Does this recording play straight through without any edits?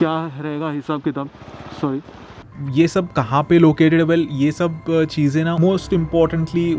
no; 2 cuts; at 2.6 s, 5.5 s

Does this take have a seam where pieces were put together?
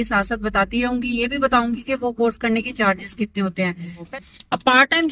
yes; 1 cut; at 4.1 s

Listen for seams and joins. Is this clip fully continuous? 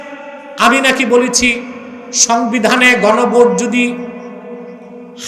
yes; 0 cuts

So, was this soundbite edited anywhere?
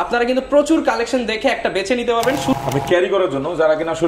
yes; 1 cut; at 2.5 s

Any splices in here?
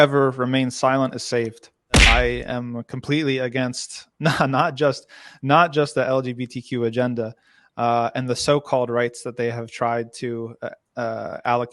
yes; 1 cut; at 2.0 s

